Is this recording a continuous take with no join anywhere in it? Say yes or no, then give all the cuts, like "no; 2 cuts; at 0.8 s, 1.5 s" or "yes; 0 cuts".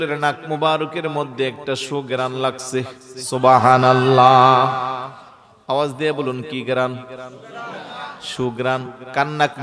yes; 0 cuts